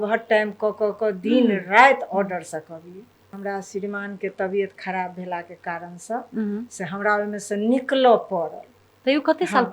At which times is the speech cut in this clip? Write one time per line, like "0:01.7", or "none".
0:03.4